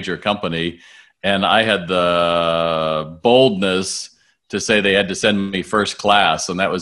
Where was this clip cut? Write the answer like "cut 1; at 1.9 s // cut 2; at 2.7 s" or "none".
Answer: none